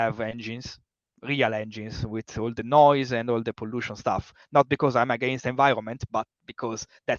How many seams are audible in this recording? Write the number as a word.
zero